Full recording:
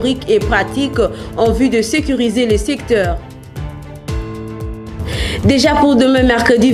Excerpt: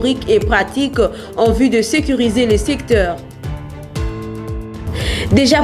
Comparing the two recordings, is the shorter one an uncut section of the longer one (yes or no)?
no